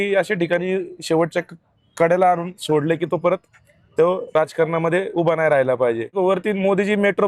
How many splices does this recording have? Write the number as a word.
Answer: one